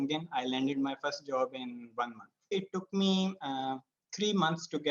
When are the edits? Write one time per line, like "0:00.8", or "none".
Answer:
0:02.5